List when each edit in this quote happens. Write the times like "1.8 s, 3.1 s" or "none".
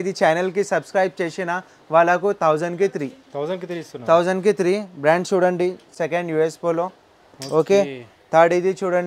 none